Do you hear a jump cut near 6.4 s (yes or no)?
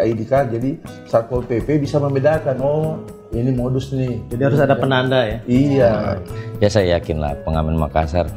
yes